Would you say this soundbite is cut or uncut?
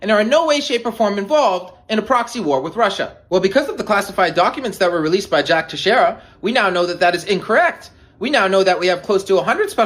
cut